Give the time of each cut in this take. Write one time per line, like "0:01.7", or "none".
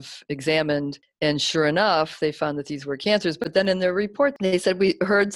0:01.0